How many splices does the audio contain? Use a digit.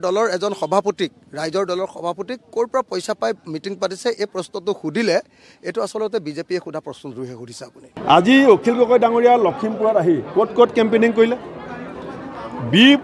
1